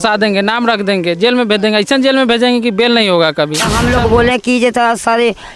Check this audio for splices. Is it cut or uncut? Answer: cut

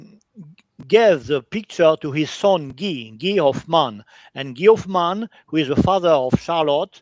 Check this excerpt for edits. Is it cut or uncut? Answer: uncut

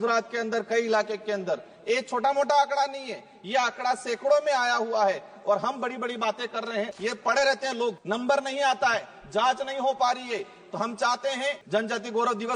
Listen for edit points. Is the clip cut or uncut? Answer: cut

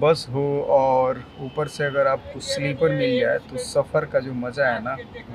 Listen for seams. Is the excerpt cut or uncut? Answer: uncut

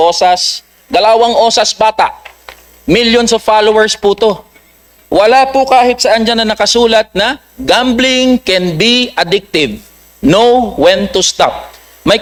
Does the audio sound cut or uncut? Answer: uncut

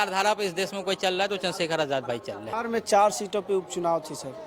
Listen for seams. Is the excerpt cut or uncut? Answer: cut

